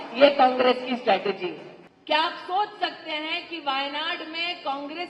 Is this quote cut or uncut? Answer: uncut